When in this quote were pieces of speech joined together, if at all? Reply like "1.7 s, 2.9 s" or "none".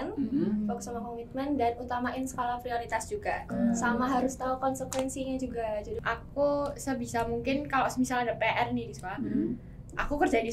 3.5 s, 6.0 s